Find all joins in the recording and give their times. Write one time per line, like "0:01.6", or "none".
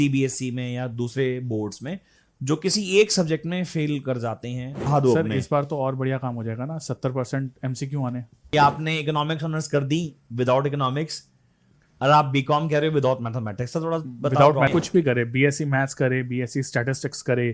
0:04.9
0:08.5
0:14.7